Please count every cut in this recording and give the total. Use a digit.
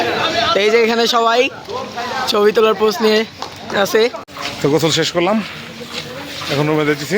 1